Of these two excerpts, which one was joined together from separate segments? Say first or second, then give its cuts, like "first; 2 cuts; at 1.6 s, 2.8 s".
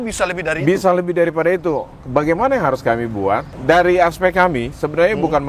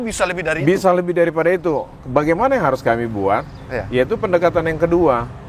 first; 1 cut; at 3.5 s